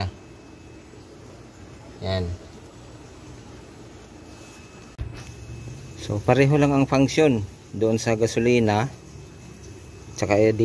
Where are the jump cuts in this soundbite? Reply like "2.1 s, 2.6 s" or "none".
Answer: 5.0 s